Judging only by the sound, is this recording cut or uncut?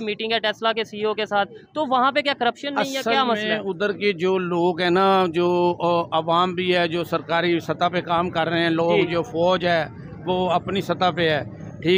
uncut